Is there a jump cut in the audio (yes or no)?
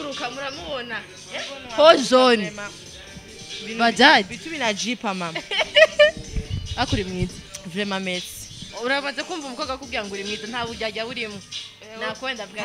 no